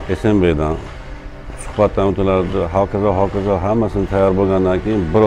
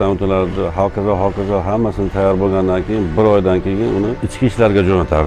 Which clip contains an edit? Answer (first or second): second